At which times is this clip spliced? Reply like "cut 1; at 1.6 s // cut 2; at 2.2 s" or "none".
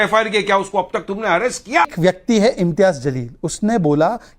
cut 1; at 1.9 s